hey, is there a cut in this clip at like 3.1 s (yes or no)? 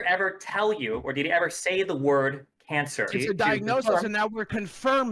yes